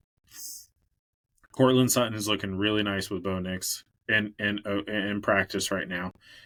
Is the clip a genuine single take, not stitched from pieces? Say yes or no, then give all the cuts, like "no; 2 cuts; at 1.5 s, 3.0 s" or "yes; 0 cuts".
yes; 0 cuts